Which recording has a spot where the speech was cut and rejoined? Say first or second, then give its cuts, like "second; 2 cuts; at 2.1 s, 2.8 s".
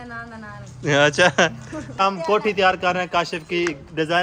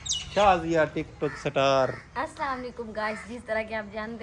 first; 1 cut; at 1.9 s